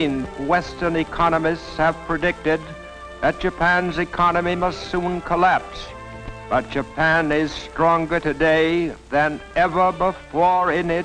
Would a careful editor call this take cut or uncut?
cut